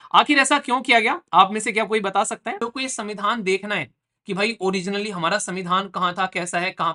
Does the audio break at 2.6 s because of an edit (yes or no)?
yes